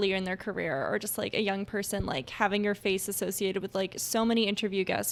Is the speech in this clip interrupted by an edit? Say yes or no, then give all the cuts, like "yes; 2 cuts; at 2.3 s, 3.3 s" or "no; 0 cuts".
no; 0 cuts